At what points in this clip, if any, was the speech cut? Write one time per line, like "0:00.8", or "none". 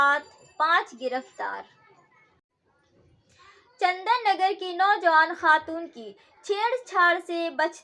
0:02.5